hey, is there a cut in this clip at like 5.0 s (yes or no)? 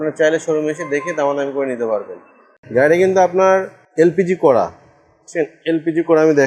no